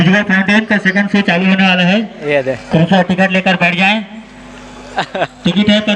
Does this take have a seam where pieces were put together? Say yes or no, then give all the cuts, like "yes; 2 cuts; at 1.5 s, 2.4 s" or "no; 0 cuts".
no; 0 cuts